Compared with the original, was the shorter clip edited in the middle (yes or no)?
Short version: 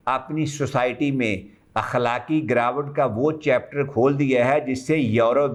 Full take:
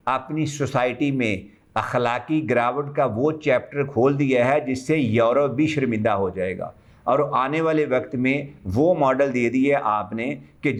no